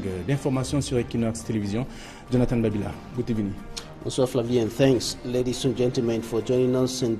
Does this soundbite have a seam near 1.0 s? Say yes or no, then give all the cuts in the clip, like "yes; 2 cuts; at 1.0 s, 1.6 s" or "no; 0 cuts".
yes; 1 cut; at 1.0 s